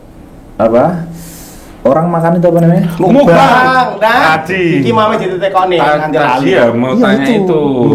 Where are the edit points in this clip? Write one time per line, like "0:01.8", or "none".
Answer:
none